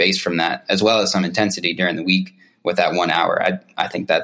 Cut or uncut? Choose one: uncut